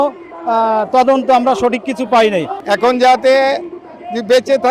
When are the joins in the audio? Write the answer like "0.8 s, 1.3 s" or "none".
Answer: 2.6 s